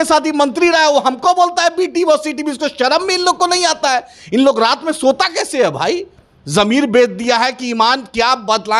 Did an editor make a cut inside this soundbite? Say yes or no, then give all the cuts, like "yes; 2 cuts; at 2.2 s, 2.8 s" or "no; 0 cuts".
no; 0 cuts